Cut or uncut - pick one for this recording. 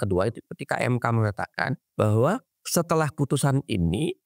cut